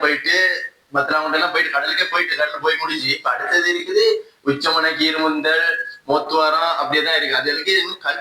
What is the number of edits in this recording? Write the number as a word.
zero